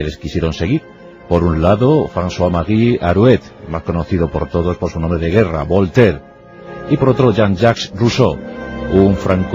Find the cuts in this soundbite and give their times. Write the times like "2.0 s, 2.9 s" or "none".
1.8 s